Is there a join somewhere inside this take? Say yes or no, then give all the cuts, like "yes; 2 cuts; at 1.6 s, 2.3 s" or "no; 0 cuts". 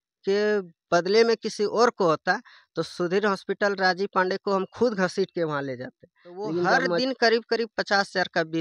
yes; 1 cut; at 7.0 s